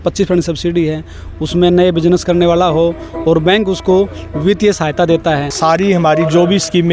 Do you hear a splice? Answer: yes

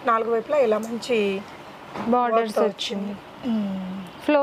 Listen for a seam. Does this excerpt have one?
no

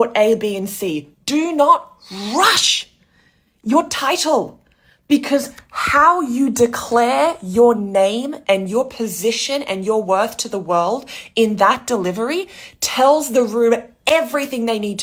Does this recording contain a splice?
no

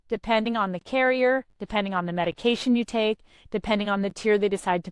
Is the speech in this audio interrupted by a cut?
no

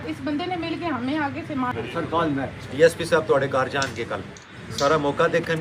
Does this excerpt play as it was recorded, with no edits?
no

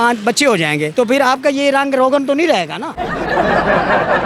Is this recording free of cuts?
yes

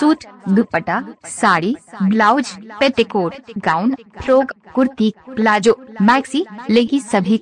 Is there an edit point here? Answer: yes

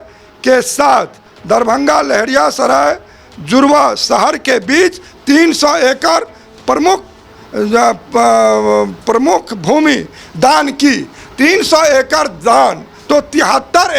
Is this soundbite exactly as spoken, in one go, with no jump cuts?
no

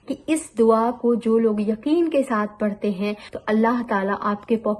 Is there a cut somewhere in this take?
yes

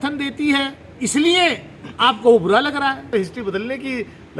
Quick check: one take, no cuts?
no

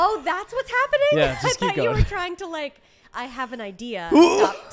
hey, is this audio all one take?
no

